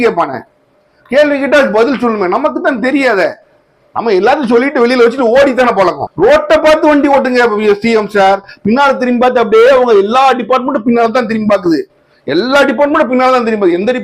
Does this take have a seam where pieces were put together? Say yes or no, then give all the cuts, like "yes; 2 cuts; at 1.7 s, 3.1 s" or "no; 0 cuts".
yes; 1 cut; at 6.0 s